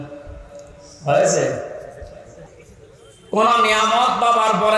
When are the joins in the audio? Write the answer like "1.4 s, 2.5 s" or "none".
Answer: 2.5 s